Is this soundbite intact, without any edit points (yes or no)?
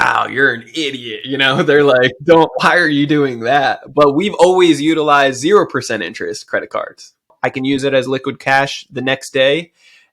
no